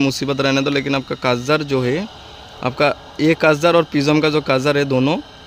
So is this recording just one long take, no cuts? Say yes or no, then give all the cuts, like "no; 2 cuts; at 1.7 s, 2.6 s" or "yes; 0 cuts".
yes; 0 cuts